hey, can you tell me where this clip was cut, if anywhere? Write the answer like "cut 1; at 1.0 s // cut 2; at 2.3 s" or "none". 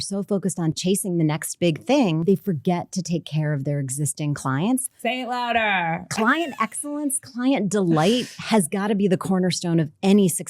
cut 1; at 0.8 s // cut 2; at 2.2 s // cut 3; at 4.9 s

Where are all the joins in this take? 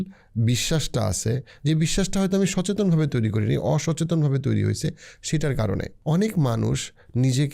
cut 1; at 5.9 s

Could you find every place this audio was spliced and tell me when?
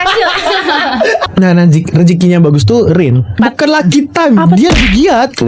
cut 1; at 1.3 s // cut 2; at 3.4 s

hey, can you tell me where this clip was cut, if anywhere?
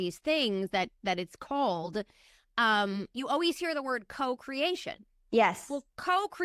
none

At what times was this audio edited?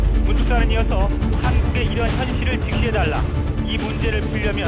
cut 1; at 2.1 s

